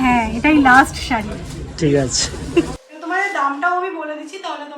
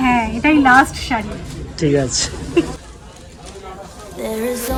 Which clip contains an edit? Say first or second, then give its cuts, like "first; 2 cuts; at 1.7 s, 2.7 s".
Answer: first; 1 cut; at 2.9 s